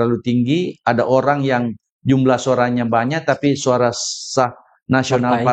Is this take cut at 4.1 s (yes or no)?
no